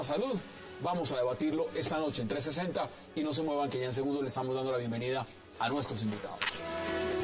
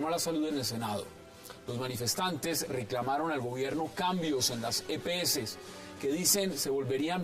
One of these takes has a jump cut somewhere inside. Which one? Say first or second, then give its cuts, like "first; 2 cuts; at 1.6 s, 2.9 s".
second; 1 cut; at 4.1 s